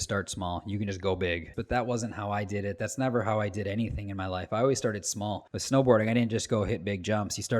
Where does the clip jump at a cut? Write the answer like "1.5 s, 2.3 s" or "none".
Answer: 1.5 s, 5.5 s